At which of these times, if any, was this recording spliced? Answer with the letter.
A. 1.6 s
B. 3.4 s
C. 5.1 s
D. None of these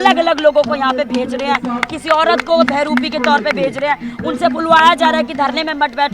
D